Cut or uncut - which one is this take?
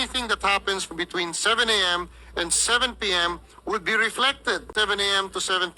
cut